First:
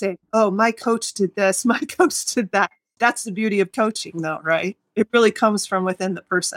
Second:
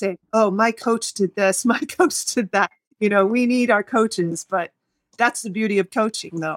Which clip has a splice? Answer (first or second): first